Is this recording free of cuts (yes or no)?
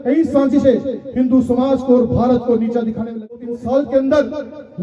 no